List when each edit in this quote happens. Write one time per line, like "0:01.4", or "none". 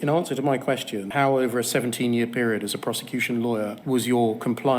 0:01.0
0:03.8

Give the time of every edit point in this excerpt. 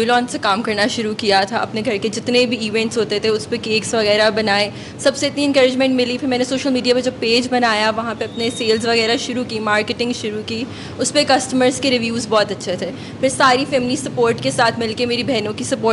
none

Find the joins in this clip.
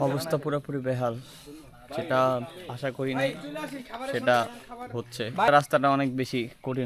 0:05.5

